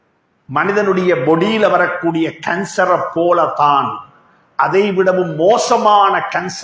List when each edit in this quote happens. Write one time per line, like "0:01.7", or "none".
none